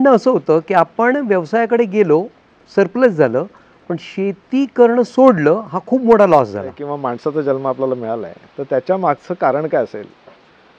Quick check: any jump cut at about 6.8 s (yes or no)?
yes